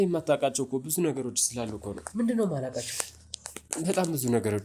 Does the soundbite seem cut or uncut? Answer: uncut